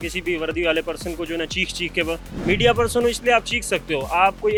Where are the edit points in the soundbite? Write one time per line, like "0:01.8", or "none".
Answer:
none